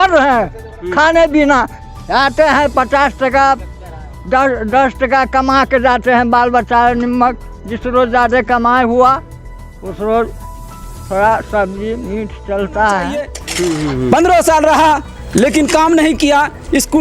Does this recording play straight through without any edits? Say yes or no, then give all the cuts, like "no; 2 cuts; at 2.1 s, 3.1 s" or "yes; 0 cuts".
no; 1 cut; at 13.4 s